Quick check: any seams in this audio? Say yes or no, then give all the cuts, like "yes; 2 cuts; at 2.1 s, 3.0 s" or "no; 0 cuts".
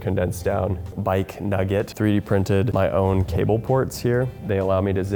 no; 0 cuts